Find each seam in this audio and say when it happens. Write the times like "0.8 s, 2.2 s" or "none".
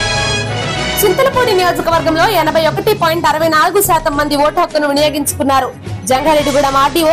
1.0 s